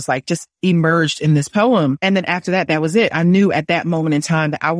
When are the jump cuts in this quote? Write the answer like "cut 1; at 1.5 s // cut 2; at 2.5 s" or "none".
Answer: none